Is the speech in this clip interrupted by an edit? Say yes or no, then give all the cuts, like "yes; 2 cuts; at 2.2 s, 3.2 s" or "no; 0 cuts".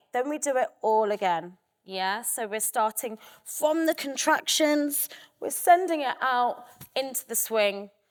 no; 0 cuts